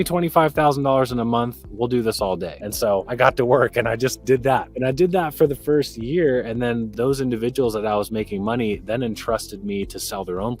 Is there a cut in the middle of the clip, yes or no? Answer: yes